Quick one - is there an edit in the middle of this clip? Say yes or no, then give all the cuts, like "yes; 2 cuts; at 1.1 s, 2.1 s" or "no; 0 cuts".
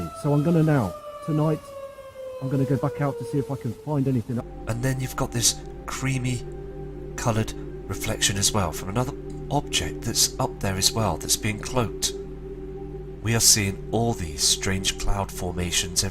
no; 0 cuts